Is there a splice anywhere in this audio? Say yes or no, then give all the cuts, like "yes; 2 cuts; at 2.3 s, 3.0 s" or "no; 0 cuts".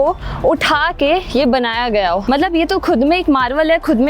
yes; 1 cut; at 2.2 s